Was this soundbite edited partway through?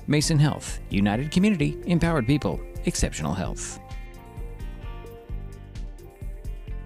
yes; 1 cut; at 3.5 s

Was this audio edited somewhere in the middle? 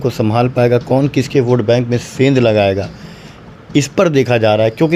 no; 0 cuts

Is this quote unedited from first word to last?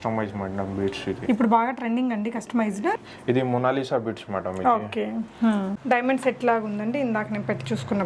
no; 2 cuts; at 3.0 s, 5.7 s

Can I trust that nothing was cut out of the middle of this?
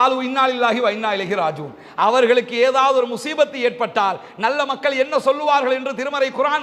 yes; 0 cuts

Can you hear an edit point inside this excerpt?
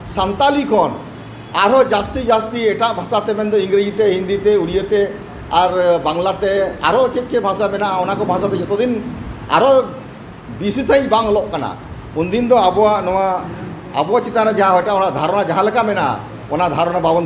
no; 0 cuts

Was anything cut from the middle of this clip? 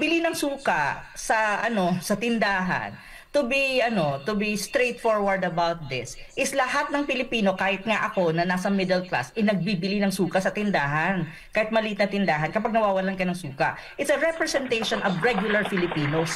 no; 0 cuts

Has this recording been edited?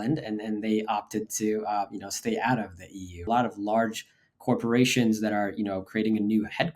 yes; 1 cut; at 3.2 s

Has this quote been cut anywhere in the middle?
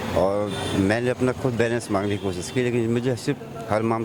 no; 0 cuts

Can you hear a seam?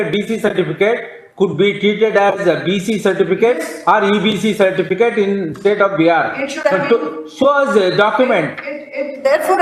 no; 0 cuts

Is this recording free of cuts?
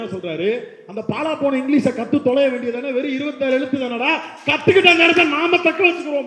yes; 0 cuts

